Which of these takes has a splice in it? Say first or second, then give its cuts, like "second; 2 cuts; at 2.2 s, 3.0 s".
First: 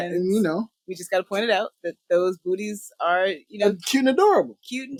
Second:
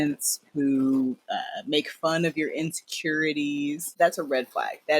second; 1 cut; at 3.9 s